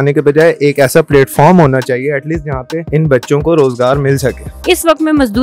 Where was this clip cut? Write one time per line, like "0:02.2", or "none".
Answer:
0:02.8
0:04.5